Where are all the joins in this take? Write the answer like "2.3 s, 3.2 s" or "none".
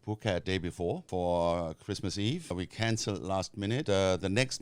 1.0 s, 2.5 s, 3.8 s